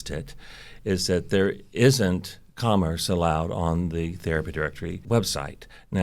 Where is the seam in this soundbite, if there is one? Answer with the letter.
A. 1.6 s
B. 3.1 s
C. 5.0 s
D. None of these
C